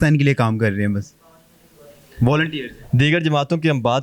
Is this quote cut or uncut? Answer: uncut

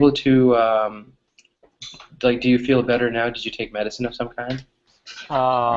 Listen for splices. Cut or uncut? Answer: uncut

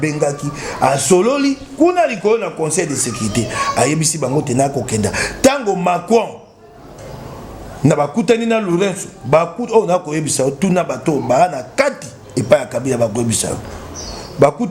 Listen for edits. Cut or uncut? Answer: uncut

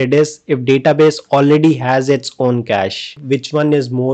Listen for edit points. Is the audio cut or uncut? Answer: cut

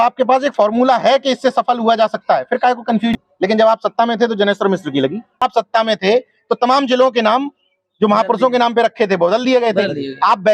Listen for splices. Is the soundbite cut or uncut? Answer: cut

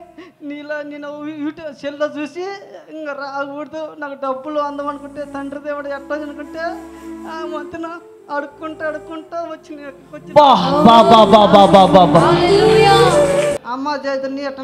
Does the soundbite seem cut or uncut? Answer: cut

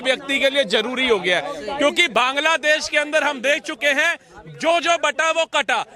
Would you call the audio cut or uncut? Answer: cut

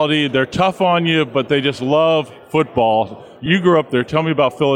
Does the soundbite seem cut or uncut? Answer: cut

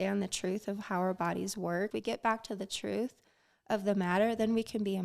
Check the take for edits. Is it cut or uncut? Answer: cut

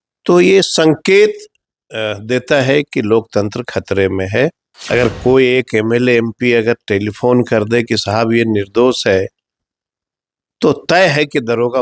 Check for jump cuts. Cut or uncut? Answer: cut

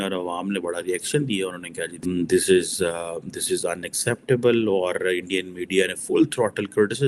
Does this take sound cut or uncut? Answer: cut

